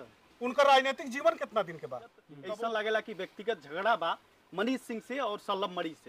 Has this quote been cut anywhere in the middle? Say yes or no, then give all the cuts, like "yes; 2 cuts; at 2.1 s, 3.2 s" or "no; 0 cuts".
yes; 1 cut; at 2.3 s